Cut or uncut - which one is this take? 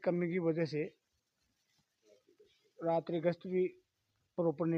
uncut